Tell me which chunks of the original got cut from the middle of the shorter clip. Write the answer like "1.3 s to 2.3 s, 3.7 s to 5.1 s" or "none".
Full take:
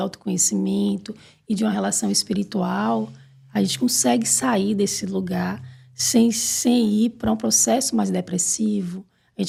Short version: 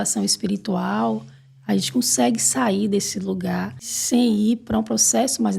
5.8 s to 6.5 s